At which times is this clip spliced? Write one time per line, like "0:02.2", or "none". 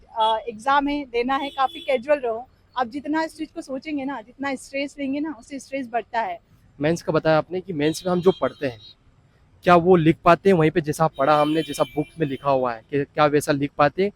0:06.5